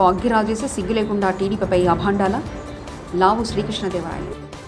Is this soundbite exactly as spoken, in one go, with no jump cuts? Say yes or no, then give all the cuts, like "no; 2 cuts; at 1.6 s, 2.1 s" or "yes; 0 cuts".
yes; 0 cuts